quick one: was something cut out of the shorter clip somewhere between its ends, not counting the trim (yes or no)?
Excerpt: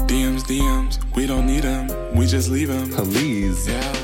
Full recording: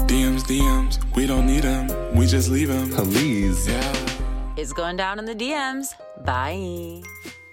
no